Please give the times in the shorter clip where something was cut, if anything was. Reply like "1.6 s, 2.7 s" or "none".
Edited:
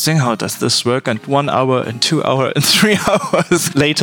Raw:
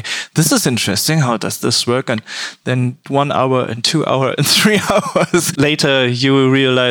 1.2 s